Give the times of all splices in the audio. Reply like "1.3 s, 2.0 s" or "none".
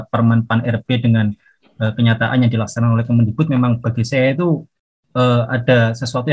none